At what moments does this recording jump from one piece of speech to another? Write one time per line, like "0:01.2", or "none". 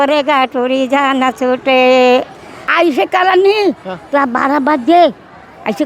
0:02.6